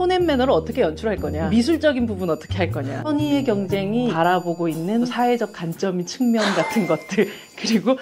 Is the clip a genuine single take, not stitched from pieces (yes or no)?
no